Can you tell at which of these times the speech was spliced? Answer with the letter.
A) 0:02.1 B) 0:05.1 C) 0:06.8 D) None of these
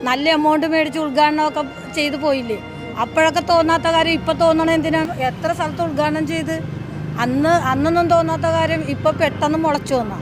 B